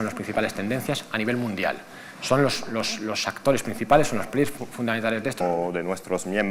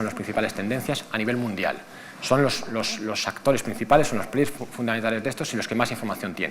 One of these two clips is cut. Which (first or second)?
second